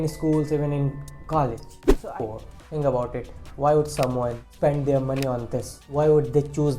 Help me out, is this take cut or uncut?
cut